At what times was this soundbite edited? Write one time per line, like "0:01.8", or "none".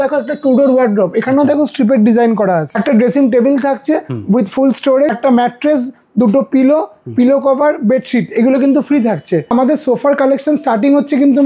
0:02.7
0:05.2
0:09.5